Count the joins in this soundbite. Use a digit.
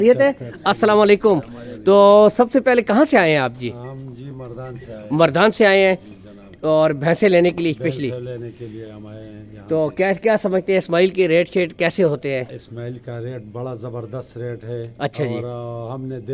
0